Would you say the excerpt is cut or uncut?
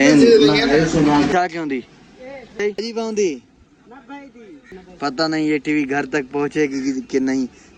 cut